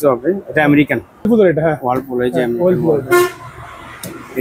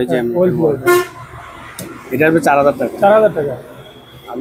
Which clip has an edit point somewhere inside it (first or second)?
first